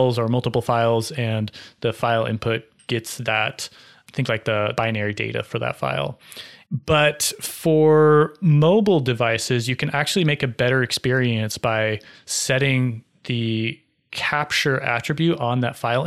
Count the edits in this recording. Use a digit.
0